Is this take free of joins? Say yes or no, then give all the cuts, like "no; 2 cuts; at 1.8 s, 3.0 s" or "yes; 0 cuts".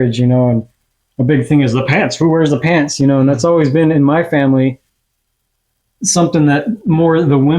yes; 0 cuts